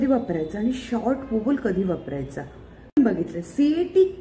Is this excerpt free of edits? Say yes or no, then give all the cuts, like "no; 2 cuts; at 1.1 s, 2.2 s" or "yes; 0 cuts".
no; 1 cut; at 3.0 s